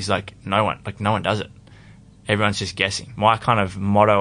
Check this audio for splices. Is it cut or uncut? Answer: cut